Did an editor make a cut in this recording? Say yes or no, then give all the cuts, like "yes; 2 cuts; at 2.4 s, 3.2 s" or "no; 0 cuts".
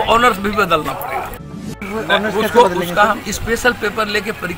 yes; 1 cut; at 1.7 s